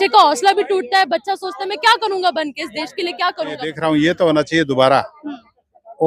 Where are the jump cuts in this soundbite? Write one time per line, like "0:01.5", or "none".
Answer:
0:03.6